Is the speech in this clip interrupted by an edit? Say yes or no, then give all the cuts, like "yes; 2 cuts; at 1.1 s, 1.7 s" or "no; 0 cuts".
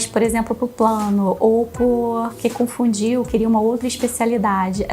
no; 0 cuts